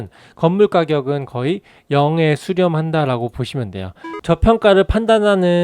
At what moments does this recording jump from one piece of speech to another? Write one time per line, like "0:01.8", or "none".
0:04.1

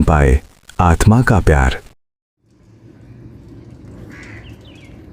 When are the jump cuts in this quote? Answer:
0:04.1

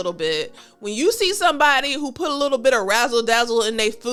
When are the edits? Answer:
none

